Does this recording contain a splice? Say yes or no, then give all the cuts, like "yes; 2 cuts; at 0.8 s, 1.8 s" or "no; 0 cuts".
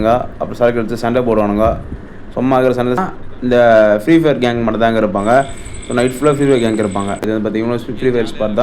yes; 2 cuts; at 3.2 s, 7.2 s